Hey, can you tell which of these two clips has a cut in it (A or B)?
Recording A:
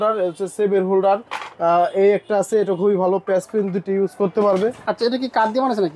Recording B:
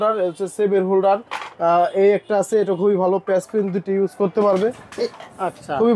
A